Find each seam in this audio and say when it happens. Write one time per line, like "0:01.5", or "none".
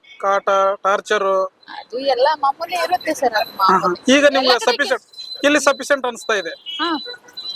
none